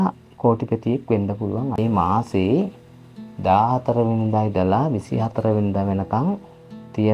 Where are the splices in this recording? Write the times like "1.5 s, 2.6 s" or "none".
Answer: 1.8 s